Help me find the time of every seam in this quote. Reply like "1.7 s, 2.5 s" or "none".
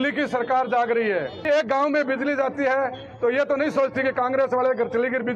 1.4 s